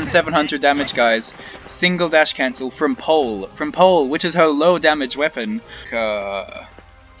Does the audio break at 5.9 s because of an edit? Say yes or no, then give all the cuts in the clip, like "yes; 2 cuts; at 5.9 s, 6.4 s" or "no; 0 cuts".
yes; 1 cut; at 5.9 s